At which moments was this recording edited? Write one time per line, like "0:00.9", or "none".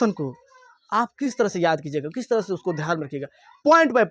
0:01.1